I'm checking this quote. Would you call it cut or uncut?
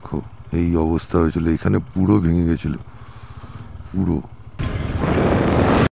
cut